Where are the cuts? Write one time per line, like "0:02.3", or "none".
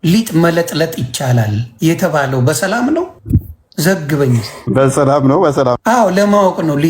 0:01.6
0:03.2
0:04.5
0:05.8